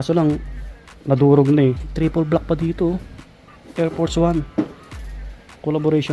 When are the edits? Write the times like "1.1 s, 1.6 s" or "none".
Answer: 1.9 s